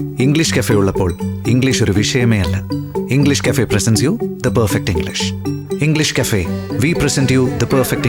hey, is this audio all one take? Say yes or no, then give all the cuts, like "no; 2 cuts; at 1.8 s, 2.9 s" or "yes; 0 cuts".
yes; 0 cuts